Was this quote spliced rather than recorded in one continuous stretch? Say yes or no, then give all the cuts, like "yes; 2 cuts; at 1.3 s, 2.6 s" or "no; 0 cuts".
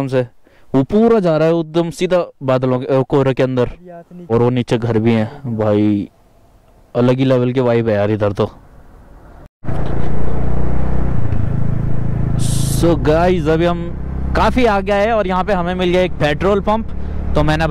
no; 0 cuts